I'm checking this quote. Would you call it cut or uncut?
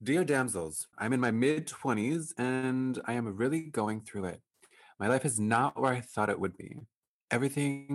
cut